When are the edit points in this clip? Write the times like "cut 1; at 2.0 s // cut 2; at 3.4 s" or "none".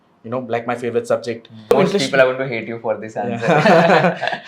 cut 1; at 1.7 s